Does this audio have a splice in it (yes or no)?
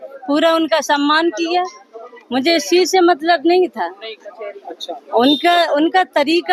no